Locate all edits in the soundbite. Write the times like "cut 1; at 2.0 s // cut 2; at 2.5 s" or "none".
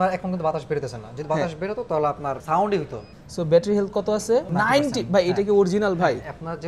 cut 1; at 2.4 s // cut 2; at 3.1 s // cut 3; at 4.5 s